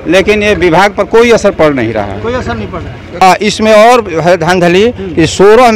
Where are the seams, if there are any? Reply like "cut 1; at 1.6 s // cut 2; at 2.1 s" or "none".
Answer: cut 1; at 3.2 s